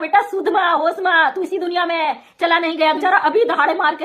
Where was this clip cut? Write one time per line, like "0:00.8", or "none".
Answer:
0:03.0